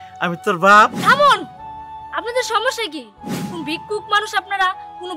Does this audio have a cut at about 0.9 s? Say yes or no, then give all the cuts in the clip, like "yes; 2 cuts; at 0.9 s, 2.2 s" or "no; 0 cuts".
yes; 1 cut; at 0.9 s